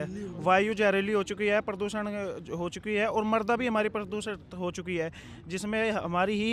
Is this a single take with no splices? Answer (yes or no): yes